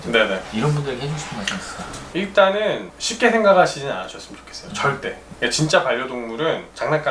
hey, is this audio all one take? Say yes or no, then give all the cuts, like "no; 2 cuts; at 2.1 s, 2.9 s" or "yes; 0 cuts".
yes; 0 cuts